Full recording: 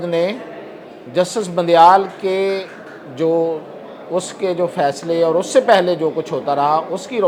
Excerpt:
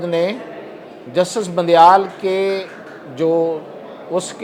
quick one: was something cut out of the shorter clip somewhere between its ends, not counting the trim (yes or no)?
no